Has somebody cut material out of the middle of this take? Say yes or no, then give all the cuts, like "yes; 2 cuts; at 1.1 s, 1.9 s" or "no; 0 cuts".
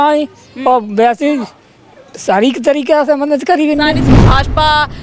yes; 1 cut; at 4.1 s